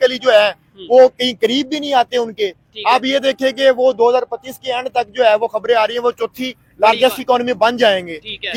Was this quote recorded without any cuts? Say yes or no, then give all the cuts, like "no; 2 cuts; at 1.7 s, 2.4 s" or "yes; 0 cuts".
yes; 0 cuts